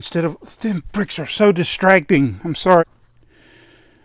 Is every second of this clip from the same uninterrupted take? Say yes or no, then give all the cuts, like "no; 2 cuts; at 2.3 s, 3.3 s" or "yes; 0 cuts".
no; 1 cut; at 2.8 s